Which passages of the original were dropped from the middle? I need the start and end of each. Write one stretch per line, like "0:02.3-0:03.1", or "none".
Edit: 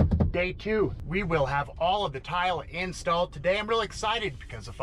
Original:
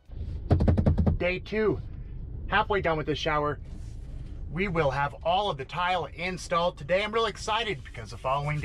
0:01.9-0:04.5